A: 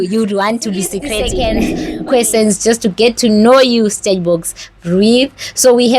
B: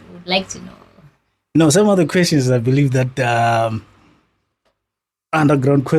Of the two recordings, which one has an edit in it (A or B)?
A